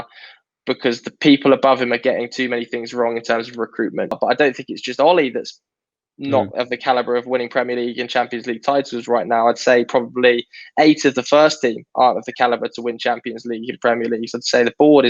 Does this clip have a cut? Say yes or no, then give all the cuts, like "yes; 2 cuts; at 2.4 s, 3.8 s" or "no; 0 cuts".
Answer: yes; 1 cut; at 4.2 s